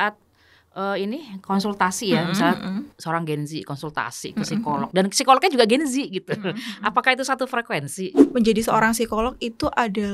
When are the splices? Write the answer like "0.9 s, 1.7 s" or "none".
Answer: 8.2 s